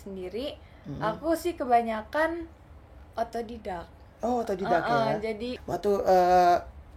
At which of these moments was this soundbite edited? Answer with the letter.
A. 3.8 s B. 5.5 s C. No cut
B